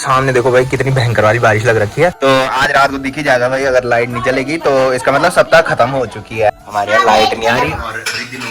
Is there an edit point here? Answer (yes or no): yes